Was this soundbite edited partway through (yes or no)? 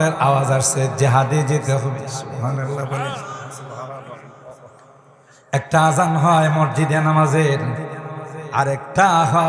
no